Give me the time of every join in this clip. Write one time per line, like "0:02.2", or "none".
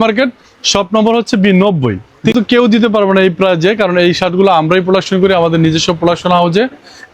0:02.3